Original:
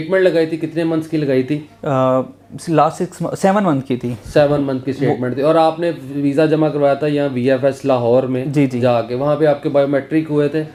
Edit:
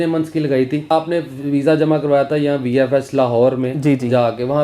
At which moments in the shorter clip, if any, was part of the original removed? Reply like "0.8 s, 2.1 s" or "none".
0.9 s